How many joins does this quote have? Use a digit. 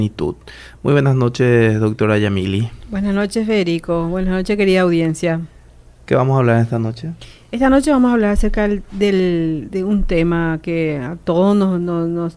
1